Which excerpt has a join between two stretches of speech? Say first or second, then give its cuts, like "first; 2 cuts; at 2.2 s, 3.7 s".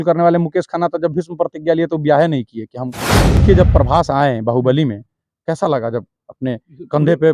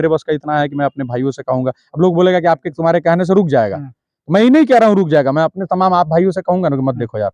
first; 1 cut; at 3.4 s